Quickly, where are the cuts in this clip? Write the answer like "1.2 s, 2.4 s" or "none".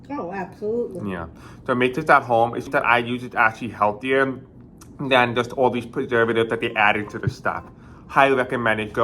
2.7 s